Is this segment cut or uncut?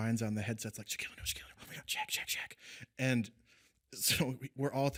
uncut